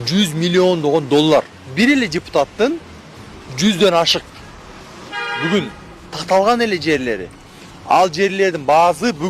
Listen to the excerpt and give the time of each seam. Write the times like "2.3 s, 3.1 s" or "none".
1.6 s